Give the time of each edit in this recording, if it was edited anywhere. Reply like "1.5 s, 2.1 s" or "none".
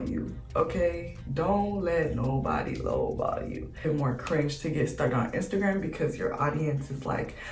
3.8 s